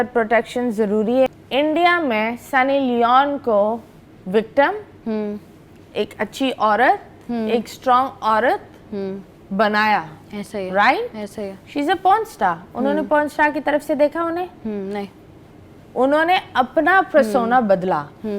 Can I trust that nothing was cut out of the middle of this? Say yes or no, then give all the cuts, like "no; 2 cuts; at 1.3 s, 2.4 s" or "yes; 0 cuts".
no; 1 cut; at 1.3 s